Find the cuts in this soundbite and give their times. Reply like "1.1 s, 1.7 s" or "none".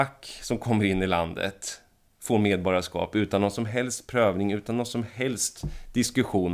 none